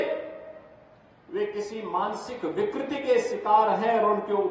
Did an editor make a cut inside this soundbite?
no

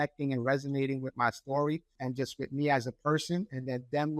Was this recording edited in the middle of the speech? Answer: yes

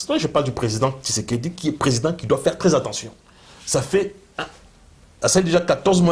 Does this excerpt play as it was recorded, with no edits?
yes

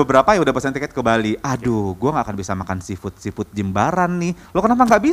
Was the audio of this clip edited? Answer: no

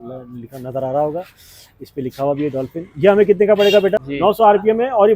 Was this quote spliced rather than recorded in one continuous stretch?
yes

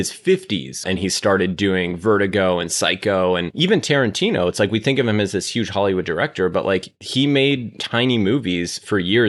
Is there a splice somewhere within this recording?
yes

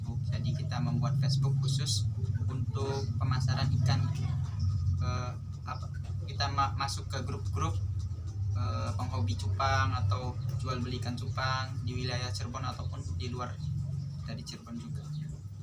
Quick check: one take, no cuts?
yes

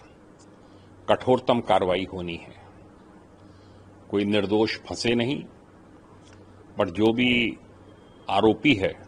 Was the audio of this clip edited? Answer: no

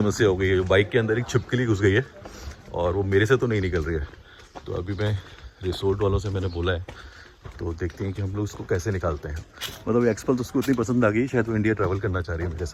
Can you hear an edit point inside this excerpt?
no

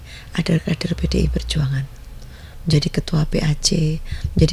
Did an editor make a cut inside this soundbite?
no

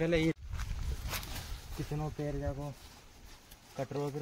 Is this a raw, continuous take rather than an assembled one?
yes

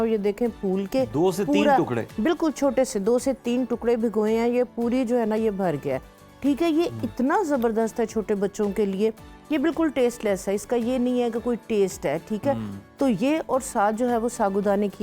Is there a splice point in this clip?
no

